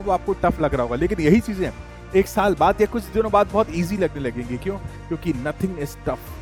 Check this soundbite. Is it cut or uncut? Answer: uncut